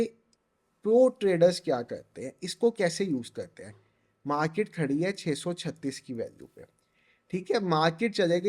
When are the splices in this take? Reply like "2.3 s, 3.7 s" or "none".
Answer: none